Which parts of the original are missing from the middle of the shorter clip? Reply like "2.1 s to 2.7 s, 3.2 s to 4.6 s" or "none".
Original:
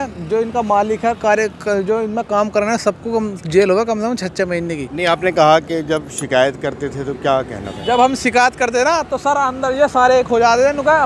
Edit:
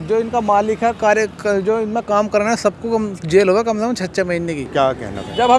4.9 s to 7.1 s